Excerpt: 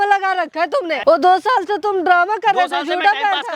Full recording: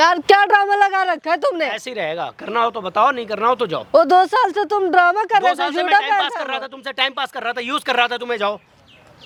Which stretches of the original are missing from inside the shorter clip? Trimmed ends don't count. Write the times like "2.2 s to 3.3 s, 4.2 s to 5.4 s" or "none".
1.7 s to 3.9 s